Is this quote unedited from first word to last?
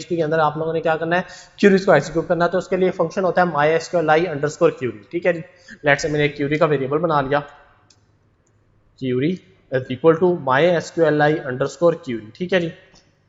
yes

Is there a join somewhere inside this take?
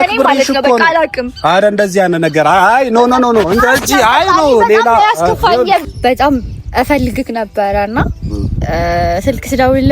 yes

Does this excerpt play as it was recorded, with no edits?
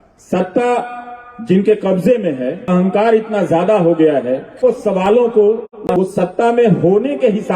no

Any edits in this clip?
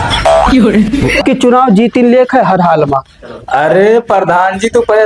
yes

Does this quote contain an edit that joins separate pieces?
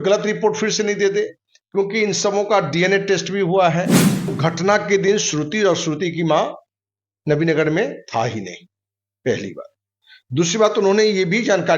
yes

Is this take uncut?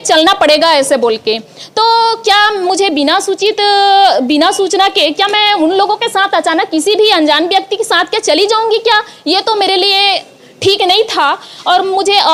yes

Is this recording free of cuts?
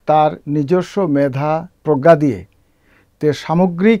yes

